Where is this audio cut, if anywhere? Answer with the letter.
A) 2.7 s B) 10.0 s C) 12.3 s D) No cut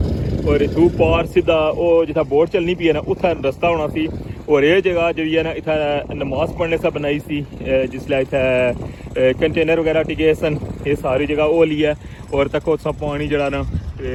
D